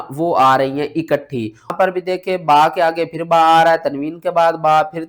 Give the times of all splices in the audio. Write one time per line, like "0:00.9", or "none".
0:01.7